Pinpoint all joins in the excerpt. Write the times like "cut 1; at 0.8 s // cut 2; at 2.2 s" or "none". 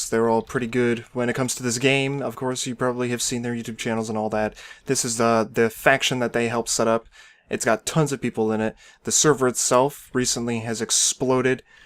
none

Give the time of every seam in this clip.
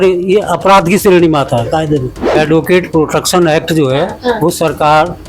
cut 1; at 2.2 s

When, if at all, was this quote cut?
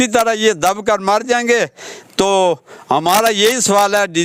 none

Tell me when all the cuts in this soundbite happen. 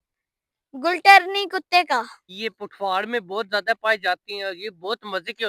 cut 1; at 2.2 s

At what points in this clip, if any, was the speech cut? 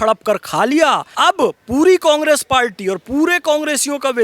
cut 1; at 1.1 s

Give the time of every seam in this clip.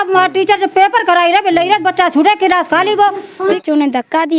cut 1; at 3.4 s

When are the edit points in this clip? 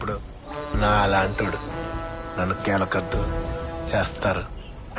none

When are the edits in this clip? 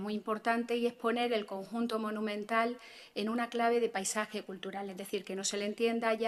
none

